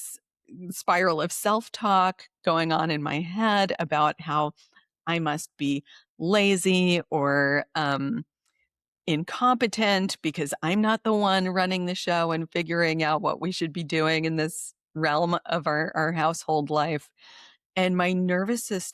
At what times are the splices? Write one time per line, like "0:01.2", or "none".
none

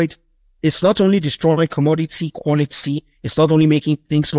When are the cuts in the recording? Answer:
none

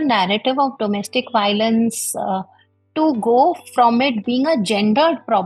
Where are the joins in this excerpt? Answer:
none

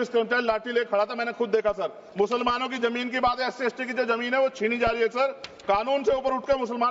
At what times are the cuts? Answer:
0:02.0

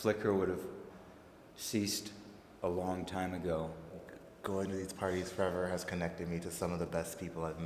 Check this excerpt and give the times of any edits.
0:00.9
0:03.9

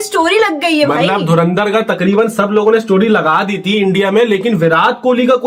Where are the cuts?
none

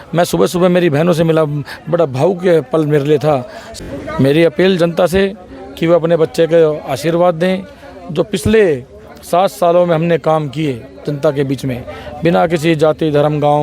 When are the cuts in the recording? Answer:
0:03.7

